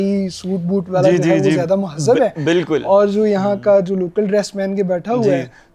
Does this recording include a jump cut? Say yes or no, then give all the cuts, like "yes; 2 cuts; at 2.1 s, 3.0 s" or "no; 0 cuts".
no; 0 cuts